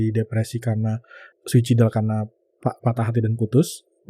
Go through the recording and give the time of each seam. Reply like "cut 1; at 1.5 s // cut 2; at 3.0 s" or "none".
cut 1; at 1.2 s